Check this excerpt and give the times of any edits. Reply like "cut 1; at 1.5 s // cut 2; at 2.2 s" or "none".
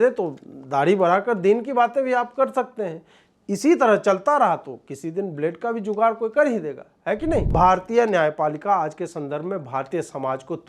cut 1; at 7.5 s